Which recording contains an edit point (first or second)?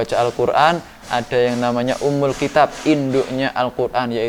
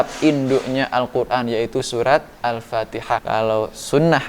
second